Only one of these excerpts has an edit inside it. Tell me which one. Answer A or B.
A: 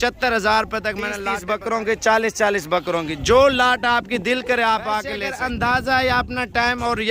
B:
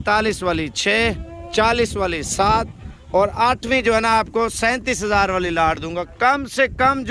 A